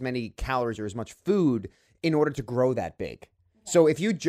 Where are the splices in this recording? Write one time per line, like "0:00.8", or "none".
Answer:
none